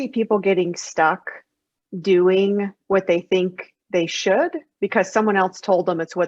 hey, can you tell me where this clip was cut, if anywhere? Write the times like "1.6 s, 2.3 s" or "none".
none